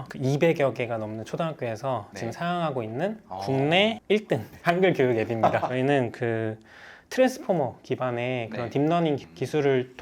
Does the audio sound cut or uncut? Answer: cut